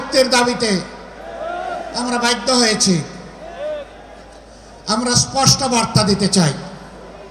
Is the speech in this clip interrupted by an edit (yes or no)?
no